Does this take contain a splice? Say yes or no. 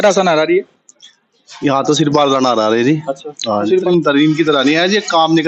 yes